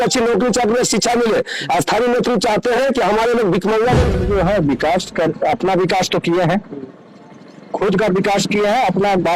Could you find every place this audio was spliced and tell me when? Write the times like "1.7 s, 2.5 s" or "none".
4.1 s